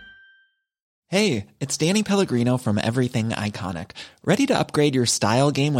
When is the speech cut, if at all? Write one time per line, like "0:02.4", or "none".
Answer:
0:00.9

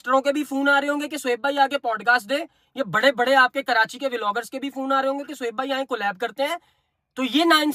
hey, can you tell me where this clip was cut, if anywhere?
none

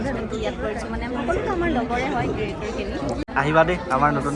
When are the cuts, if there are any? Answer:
0:03.2

